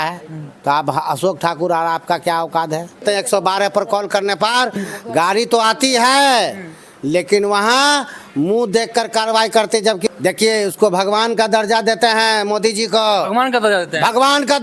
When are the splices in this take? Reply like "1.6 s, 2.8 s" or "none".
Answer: 3.0 s, 10.1 s